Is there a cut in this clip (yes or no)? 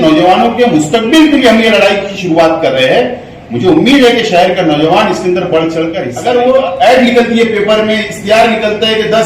yes